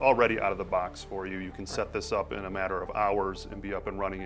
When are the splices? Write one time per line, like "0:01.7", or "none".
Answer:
none